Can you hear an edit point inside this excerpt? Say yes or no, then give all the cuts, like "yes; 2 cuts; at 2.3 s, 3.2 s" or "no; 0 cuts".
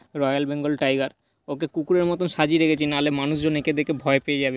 no; 0 cuts